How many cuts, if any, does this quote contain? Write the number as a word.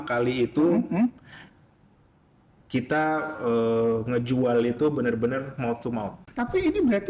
one